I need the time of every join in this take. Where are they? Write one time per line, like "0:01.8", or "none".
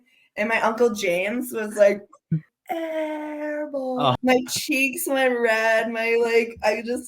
0:02.6
0:04.1